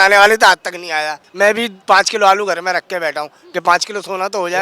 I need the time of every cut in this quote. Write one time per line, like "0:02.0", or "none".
0:01.2

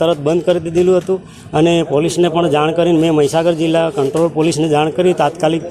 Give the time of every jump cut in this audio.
none

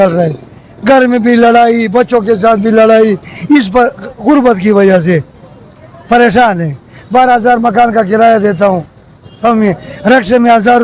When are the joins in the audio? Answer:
none

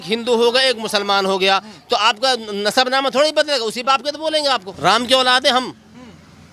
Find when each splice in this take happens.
0:04.7

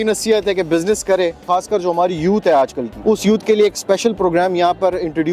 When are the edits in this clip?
0:01.4
0:02.9

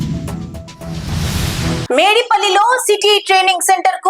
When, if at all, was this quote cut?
0:01.9

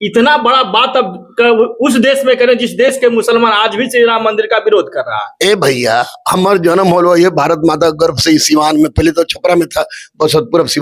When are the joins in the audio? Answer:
none

